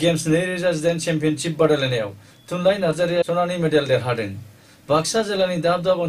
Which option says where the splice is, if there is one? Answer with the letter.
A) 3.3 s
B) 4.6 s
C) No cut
A